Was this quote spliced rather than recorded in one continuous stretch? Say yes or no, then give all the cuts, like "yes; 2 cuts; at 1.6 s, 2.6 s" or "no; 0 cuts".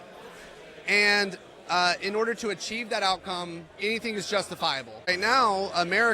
yes; 1 cut; at 5.1 s